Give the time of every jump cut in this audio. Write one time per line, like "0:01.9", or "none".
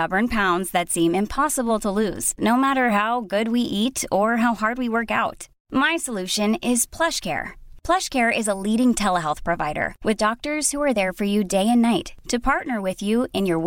none